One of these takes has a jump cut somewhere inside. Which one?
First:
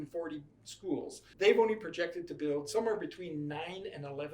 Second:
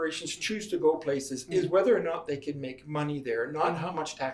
first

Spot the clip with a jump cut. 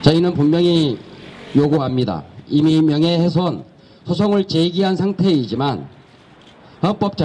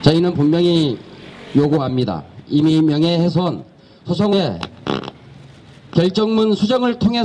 first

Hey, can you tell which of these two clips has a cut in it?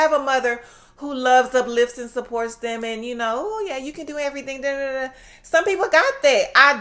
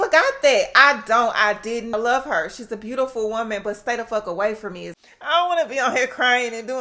second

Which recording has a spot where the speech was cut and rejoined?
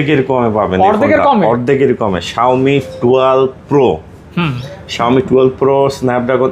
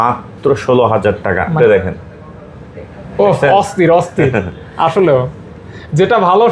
second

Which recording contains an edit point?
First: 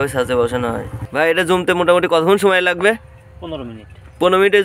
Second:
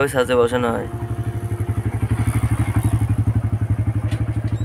first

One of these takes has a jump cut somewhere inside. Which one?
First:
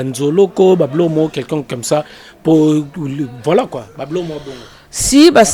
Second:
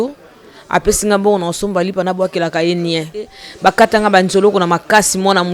second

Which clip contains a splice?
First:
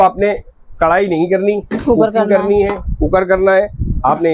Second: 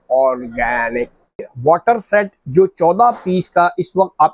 second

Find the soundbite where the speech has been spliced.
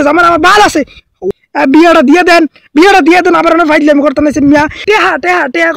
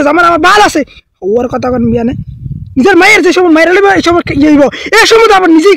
first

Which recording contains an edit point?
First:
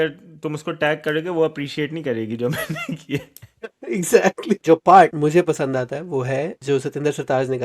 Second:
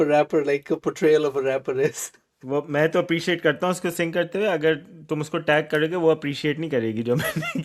first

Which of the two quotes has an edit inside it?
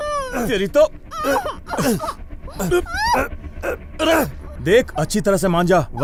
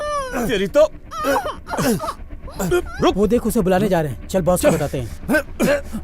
second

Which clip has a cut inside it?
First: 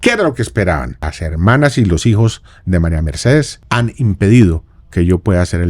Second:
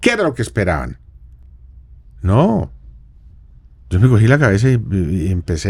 first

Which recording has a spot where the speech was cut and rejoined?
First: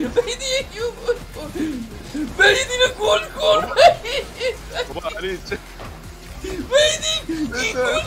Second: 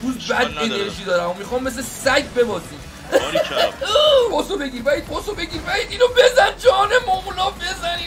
second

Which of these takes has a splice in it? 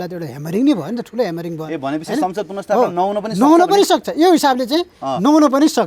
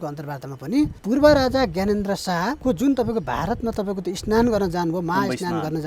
second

